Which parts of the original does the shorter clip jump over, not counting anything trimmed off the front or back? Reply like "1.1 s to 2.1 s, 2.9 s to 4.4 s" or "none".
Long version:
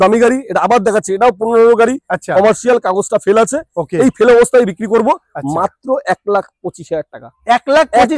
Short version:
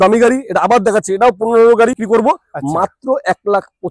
2.0 s to 4.8 s

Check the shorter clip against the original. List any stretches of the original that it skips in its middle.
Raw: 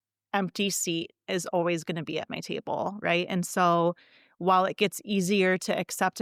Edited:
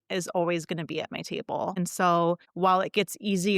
2.9 s to 3.3 s, 4.0 s to 4.3 s

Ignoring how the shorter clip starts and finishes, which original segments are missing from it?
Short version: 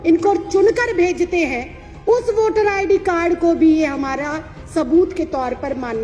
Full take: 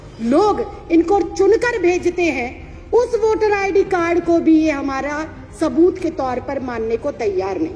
none

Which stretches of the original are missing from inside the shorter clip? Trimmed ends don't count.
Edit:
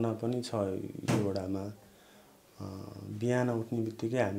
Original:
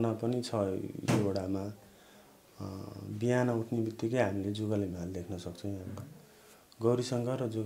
none

